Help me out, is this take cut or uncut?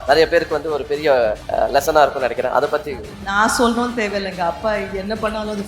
cut